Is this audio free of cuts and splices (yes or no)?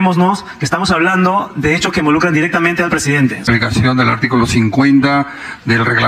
no